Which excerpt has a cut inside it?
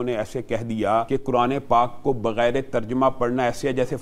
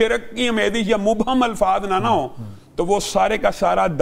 first; 1 cut; at 1.1 s

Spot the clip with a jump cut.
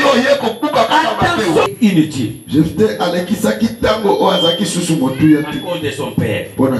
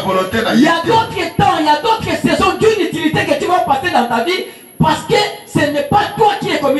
first; 1 cut; at 1.7 s

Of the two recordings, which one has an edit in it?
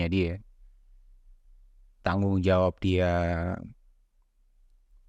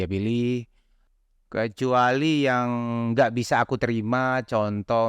second; 1 cut; at 1.1 s

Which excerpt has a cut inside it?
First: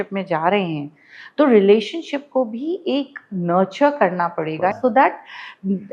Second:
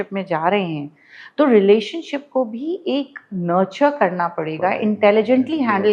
first; 1 cut; at 4.8 s

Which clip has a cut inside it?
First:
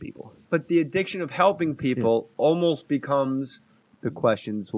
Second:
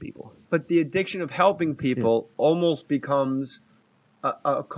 second; 1 cut; at 3.9 s

